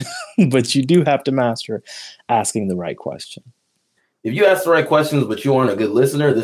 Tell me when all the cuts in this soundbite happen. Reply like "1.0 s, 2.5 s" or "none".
4.0 s